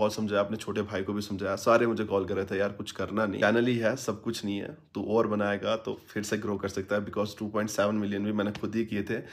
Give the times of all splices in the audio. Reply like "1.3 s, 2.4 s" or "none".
none

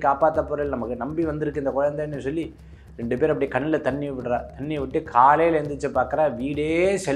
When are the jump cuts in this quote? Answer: none

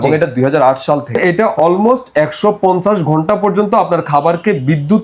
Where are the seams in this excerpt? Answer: 1.2 s

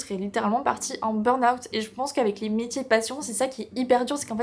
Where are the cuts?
none

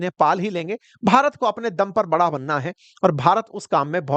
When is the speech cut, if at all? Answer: none

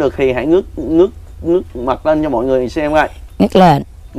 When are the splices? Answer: none

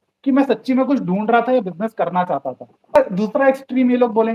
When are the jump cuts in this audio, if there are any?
3.0 s

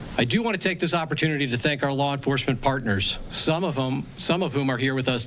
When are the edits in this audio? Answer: none

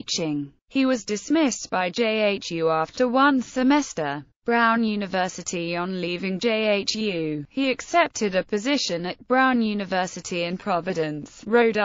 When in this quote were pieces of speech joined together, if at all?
3.5 s

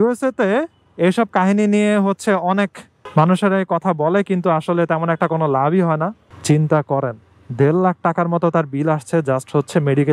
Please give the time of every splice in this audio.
6.3 s

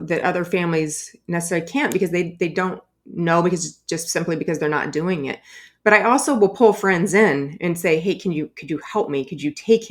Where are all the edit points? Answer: none

